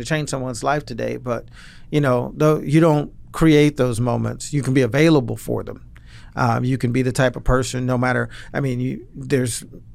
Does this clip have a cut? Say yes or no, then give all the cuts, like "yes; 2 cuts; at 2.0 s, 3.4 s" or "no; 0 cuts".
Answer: no; 0 cuts